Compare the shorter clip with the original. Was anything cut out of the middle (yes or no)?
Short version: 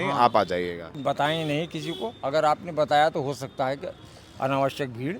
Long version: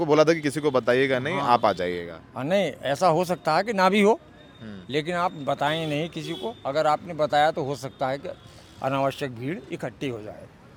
yes